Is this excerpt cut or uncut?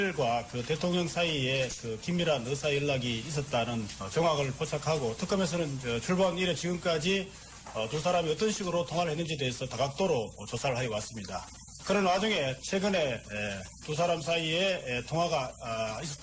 cut